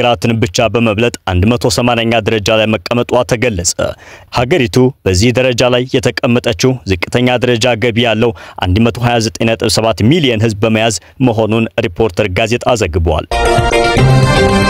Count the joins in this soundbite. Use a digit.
1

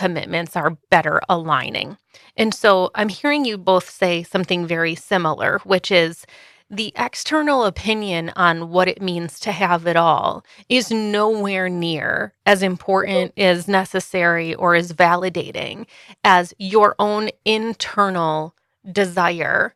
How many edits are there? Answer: 0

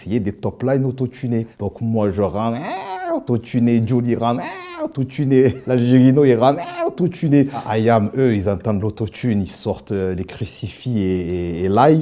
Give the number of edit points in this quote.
2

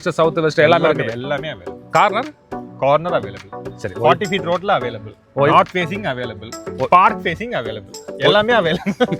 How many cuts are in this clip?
0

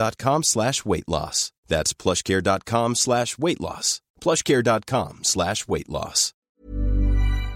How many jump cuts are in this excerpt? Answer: 1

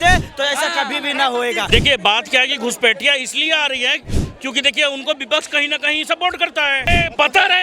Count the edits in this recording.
2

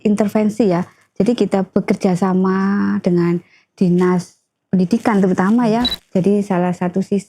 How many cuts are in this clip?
1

